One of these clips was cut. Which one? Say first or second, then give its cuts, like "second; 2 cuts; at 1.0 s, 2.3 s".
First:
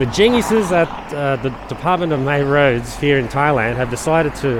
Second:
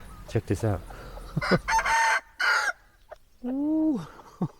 second; 1 cut; at 1.6 s